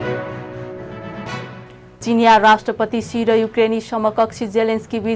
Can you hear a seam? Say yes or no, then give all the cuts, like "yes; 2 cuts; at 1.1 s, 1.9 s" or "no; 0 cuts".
no; 0 cuts